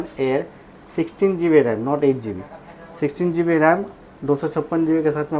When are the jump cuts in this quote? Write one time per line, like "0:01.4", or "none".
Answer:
none